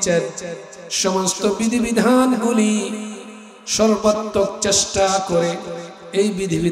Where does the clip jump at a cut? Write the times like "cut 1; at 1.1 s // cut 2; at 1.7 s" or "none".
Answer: none

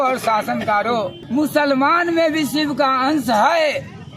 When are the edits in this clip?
cut 1; at 1.2 s

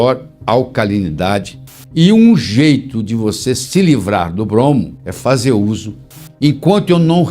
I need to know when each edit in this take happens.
cut 1; at 1.8 s // cut 2; at 6.2 s

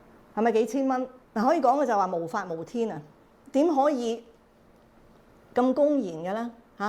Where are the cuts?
cut 1; at 1.1 s

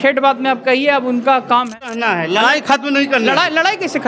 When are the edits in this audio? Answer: cut 1; at 2.0 s

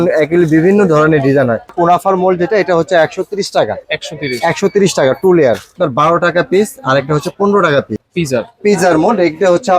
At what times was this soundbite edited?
cut 1; at 1.7 s // cut 2; at 5.7 s // cut 3; at 8.0 s

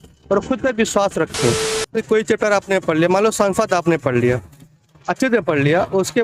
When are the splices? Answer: cut 1; at 2.0 s

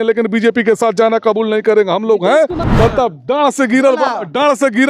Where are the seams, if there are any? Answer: cut 1; at 2.6 s

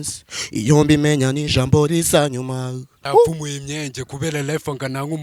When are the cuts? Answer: cut 1; at 3.0 s

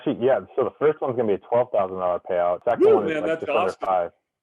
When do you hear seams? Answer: cut 1; at 2.6 s

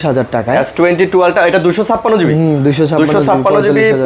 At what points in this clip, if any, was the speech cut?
none

